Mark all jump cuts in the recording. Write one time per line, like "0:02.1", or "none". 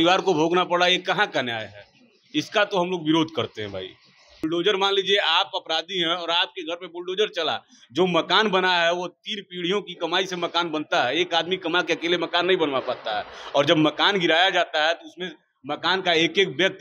0:04.4